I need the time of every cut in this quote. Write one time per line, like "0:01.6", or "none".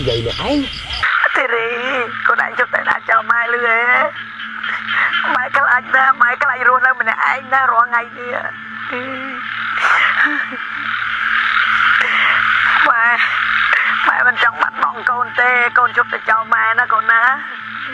none